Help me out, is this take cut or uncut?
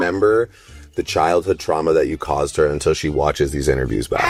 uncut